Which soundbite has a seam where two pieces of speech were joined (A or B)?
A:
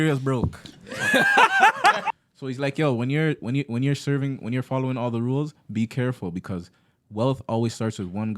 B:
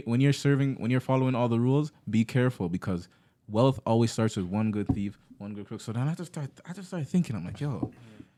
A